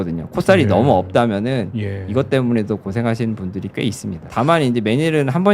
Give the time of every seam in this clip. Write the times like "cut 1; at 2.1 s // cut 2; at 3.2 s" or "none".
cut 1; at 4.2 s